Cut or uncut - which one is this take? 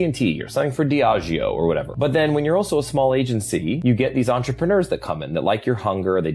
cut